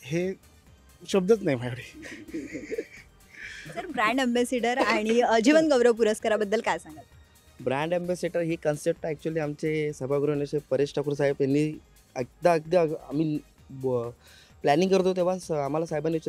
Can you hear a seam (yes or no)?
no